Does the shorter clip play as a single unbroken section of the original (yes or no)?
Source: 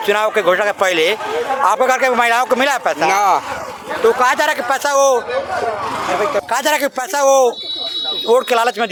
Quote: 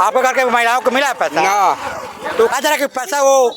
no